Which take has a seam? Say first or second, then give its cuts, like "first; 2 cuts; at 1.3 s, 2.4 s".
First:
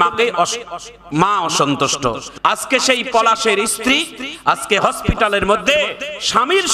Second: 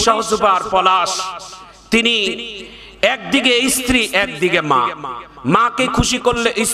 first; 1 cut; at 2.3 s